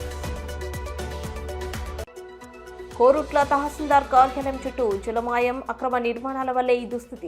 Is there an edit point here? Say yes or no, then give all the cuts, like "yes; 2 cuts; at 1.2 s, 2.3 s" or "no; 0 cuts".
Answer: yes; 1 cut; at 2.0 s